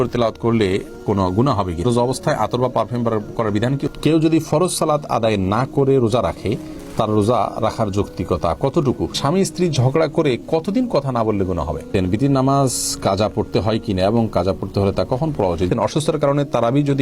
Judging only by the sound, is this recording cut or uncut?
cut